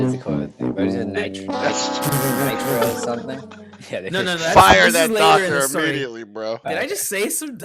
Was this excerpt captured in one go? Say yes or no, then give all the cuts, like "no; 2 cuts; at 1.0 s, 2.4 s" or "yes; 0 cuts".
no; 1 cut; at 6.6 s